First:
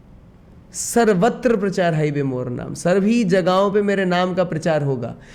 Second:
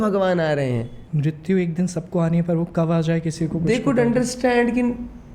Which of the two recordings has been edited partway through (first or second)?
second